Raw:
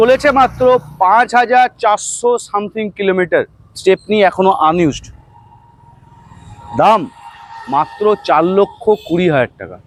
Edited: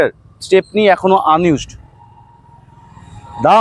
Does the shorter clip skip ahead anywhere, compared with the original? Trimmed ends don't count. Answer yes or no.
no